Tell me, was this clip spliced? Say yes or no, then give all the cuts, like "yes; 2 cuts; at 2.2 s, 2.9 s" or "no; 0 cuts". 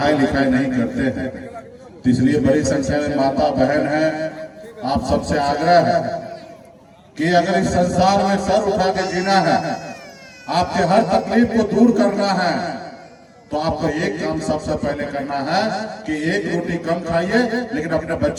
no; 0 cuts